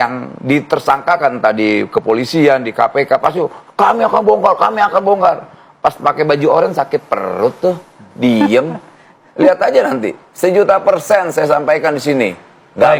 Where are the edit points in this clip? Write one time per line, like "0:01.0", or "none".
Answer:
none